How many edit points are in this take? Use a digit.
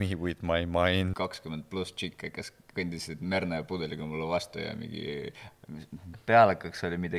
1